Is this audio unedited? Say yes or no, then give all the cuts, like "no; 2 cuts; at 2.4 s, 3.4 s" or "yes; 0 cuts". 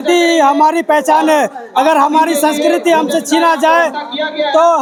yes; 0 cuts